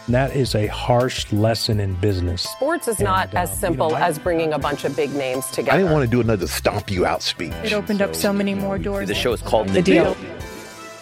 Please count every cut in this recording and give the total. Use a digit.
0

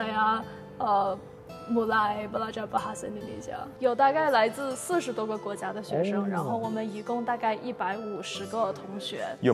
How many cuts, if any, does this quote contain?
1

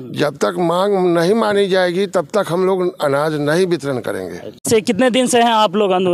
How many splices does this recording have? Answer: 1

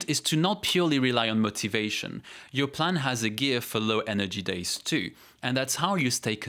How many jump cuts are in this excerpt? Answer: 0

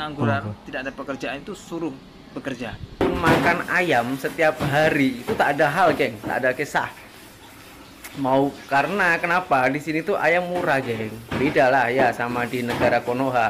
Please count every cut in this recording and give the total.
1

